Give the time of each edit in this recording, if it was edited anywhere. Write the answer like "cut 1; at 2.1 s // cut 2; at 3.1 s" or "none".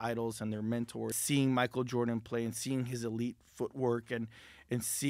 cut 1; at 1.2 s